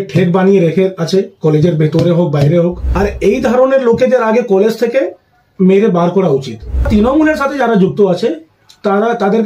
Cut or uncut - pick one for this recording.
cut